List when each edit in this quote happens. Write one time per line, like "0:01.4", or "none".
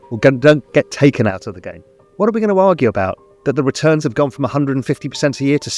0:02.0